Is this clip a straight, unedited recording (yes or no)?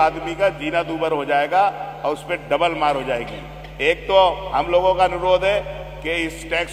yes